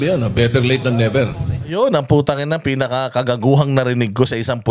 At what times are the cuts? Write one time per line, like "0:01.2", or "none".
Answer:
none